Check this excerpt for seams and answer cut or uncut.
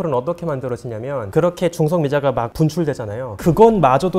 uncut